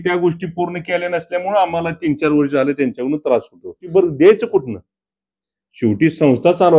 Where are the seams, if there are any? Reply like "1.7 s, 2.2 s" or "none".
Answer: 3.8 s